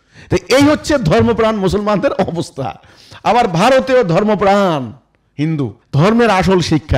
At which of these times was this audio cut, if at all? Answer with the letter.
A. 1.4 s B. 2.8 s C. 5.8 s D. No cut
C